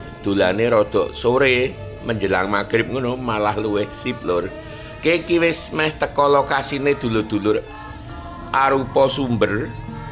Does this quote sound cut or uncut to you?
uncut